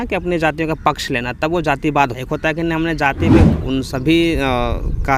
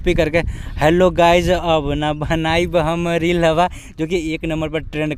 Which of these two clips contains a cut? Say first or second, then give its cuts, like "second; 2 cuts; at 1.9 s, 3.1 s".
first; 1 cut; at 3.6 s